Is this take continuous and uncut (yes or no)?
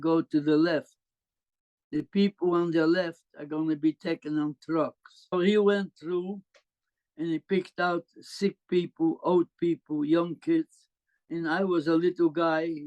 no